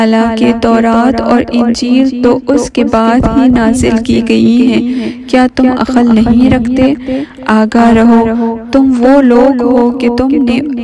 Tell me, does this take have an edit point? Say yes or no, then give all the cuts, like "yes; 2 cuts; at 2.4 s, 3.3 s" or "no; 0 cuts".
no; 0 cuts